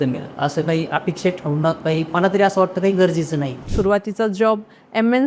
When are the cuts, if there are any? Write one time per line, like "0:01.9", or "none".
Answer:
0:03.6